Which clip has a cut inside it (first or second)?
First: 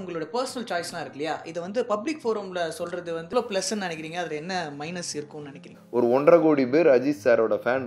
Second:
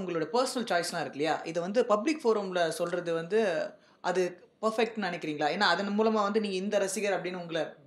first